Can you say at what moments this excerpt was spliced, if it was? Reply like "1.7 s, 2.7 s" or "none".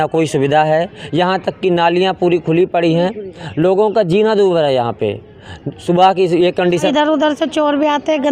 6.9 s